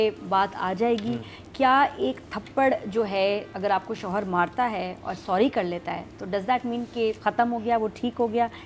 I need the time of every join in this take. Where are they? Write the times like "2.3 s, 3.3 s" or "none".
3.5 s, 7.2 s